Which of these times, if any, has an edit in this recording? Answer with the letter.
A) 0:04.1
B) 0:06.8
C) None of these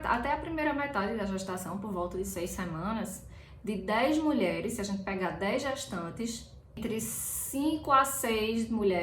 B